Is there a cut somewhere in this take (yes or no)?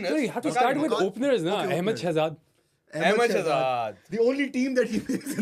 no